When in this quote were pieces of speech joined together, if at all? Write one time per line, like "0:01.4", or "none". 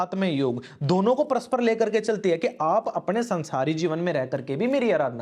none